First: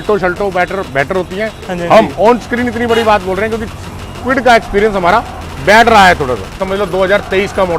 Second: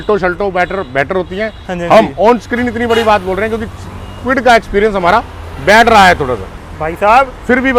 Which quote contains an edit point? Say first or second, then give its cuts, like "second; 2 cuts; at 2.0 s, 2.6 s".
first; 1 cut; at 6.6 s